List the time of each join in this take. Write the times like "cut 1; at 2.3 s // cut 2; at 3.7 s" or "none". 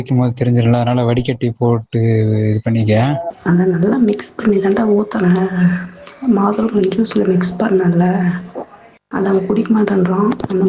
cut 1; at 3.3 s

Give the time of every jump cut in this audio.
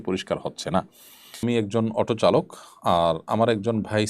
cut 1; at 1.4 s

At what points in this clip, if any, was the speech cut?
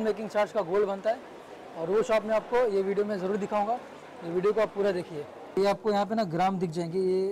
cut 1; at 5.6 s

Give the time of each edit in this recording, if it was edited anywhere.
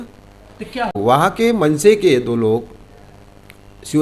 cut 1; at 1.2 s

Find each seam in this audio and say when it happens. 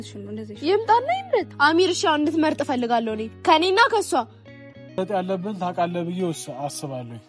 cut 1; at 1.5 s // cut 2; at 5.0 s

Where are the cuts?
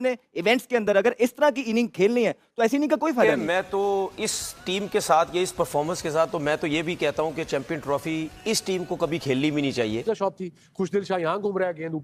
cut 1; at 3.4 s // cut 2; at 10.0 s

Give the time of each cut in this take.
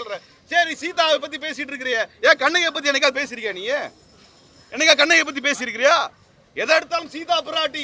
none

